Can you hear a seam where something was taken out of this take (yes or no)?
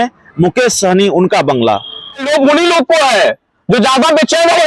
yes